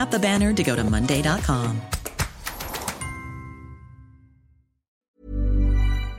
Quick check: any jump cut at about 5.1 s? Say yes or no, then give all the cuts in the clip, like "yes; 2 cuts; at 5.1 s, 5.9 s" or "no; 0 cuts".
yes; 1 cut; at 5.1 s